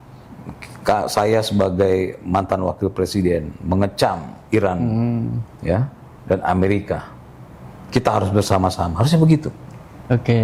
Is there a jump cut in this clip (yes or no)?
no